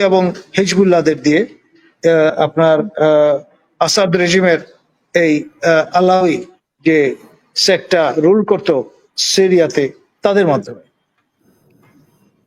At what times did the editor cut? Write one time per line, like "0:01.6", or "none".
none